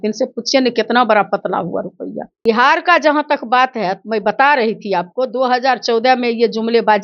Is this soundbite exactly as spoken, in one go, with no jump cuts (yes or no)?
no